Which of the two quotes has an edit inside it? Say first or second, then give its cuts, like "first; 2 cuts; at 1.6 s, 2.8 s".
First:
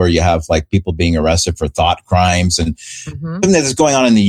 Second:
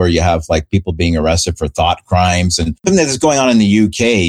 second; 1 cut; at 2.8 s